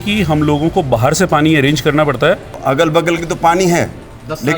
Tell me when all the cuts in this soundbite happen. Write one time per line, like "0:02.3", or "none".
0:02.5